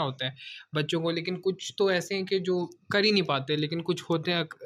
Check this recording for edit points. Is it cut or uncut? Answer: uncut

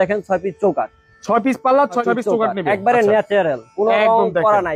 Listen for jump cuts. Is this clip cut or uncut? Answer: uncut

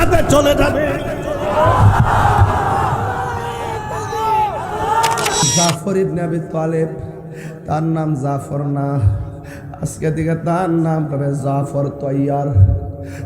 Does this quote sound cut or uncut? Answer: cut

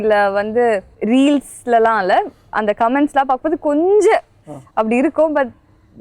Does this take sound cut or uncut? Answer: cut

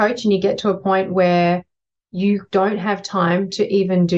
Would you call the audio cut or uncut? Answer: uncut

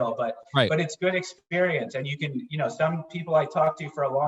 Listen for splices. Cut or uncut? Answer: uncut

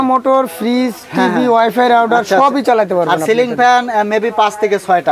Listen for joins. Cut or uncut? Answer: uncut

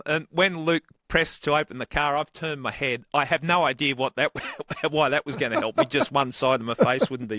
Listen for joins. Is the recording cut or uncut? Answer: uncut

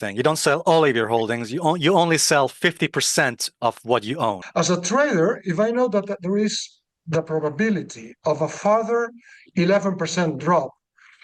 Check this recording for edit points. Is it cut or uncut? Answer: cut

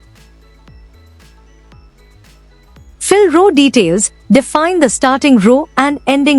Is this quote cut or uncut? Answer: cut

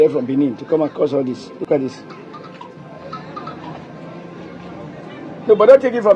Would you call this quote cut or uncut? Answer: uncut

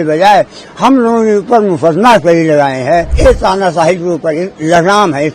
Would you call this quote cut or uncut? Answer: cut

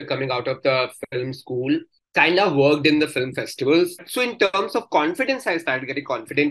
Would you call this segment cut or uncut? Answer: cut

